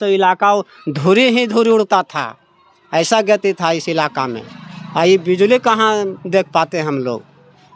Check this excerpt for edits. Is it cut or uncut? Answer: uncut